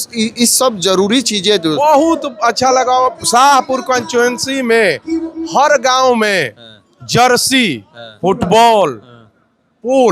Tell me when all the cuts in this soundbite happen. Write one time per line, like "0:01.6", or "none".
0:01.7